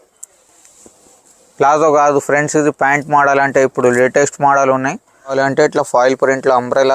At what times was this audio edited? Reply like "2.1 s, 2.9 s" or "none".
5.3 s